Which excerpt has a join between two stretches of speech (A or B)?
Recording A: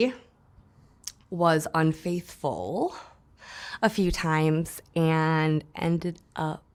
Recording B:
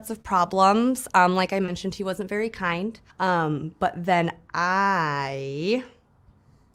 B